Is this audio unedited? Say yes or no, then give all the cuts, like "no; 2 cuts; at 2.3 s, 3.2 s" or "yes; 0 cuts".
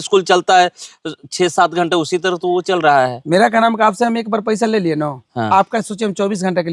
yes; 0 cuts